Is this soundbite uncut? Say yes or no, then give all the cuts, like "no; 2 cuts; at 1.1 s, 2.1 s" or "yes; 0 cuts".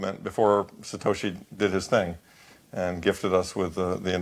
yes; 0 cuts